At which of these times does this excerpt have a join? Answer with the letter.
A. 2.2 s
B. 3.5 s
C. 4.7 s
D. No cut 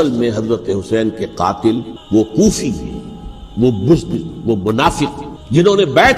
A